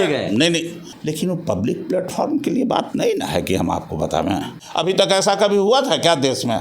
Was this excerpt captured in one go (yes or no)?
no